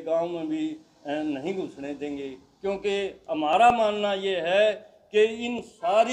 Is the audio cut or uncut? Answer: uncut